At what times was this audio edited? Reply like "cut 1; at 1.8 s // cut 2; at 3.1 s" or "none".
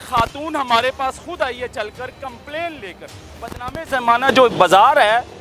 cut 1; at 3.3 s